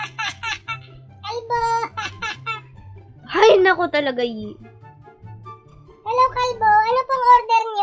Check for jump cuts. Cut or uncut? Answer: uncut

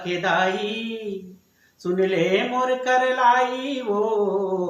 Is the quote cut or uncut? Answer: uncut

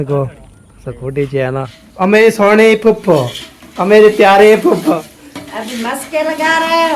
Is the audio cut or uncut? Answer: cut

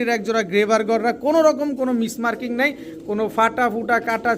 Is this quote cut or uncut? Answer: uncut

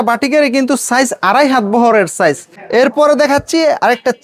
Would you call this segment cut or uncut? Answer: cut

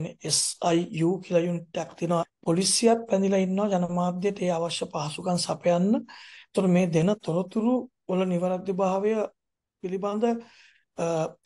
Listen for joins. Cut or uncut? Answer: cut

